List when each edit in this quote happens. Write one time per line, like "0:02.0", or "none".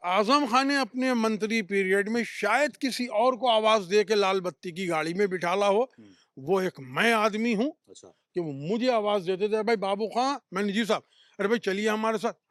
none

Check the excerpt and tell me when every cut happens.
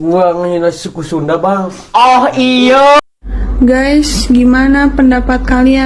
0:03.0

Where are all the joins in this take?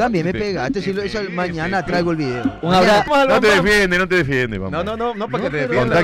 0:03.1

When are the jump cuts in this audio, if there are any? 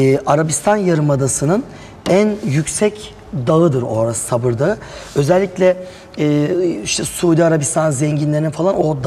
none

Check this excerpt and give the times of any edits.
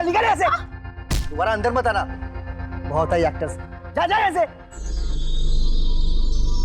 0:04.8

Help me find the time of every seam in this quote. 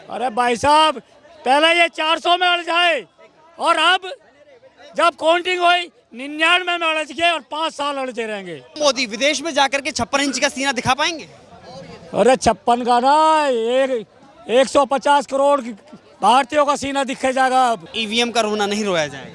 0:08.8
0:18.0

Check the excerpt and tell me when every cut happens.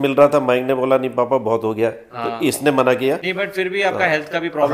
0:03.3

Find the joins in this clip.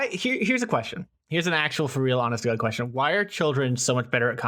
none

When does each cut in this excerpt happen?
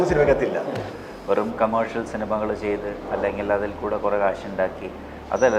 0:00.9

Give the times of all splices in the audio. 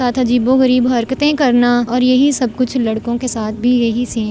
0:01.9

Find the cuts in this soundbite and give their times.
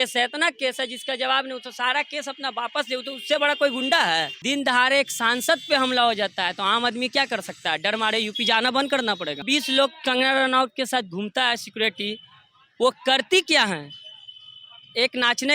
0:04.3
0:09.4

